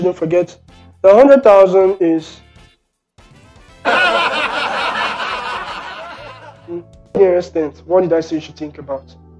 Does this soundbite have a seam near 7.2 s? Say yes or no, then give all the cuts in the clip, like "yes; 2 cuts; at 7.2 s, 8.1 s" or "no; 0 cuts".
yes; 1 cut; at 7.2 s